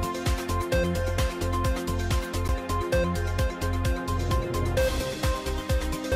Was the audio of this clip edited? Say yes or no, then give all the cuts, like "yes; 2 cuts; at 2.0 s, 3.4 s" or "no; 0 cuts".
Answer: yes; 1 cut; at 1.2 s